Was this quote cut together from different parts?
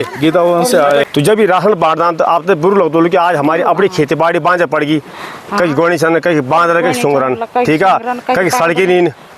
yes; 1 cut; at 1.1 s

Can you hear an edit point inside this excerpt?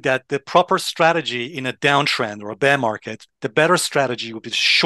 yes; 1 cut; at 3.4 s

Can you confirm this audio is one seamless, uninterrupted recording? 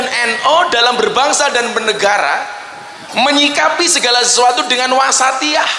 yes; 0 cuts

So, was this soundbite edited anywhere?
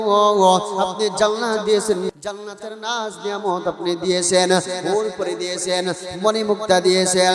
yes; 1 cut; at 2.1 s

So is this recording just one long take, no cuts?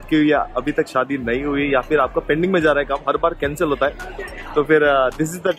yes; 0 cuts

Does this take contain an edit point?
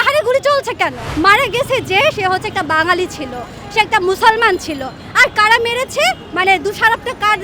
yes; 1 cut; at 1.0 s

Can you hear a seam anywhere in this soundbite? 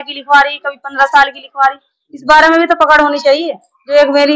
no; 0 cuts

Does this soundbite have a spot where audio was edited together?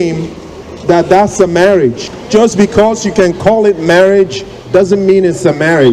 yes; 1 cut; at 2.1 s

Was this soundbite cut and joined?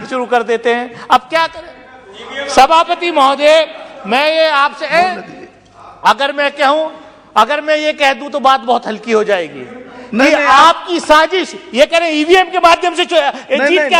no; 0 cuts

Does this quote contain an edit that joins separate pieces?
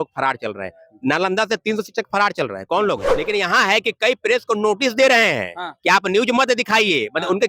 yes; 1 cut; at 3.1 s

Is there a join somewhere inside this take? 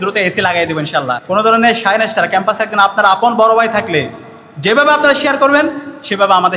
yes; 1 cut; at 1.2 s

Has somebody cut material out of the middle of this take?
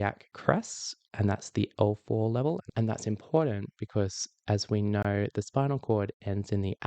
yes; 1 cut; at 2.7 s

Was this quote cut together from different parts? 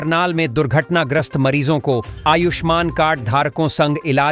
no; 0 cuts

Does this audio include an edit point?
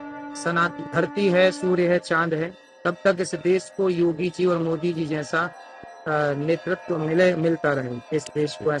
no; 0 cuts

